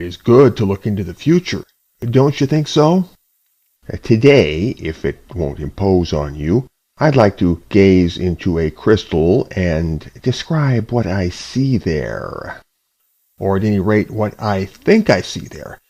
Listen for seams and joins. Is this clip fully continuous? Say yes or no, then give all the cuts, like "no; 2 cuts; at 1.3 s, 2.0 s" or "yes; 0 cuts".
no; 1 cut; at 14.3 s